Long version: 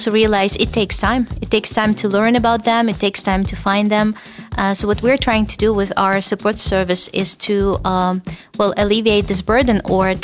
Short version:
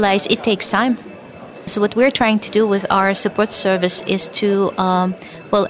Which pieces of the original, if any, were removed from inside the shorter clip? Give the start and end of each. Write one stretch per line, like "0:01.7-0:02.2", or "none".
0:01.4-0:04.2